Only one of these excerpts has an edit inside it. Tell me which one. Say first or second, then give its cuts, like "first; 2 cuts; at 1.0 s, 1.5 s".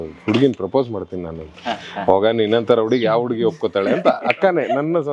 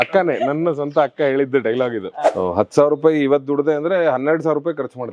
second; 1 cut; at 2.2 s